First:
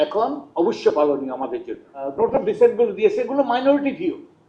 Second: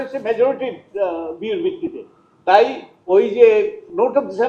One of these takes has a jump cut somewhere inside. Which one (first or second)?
first